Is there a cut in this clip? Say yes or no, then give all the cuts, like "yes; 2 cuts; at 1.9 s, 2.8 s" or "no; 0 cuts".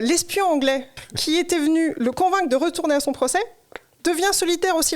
yes; 1 cut; at 1.0 s